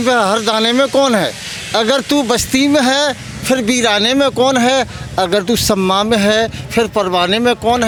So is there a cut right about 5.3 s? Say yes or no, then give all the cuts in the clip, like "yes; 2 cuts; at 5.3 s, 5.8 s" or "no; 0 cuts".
no; 0 cuts